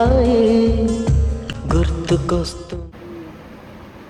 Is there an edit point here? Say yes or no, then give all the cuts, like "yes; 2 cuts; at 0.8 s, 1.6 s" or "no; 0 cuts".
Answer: no; 0 cuts